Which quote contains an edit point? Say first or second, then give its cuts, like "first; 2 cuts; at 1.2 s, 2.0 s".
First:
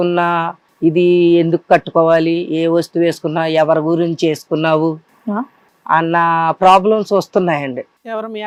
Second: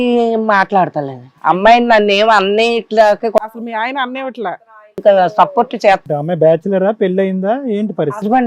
second; 1 cut; at 6.1 s